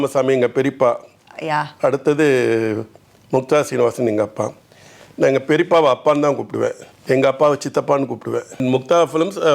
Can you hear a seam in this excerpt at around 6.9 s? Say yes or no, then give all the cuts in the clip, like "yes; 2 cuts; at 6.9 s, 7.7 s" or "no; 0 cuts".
yes; 2 cuts; at 6.9 s, 8.6 s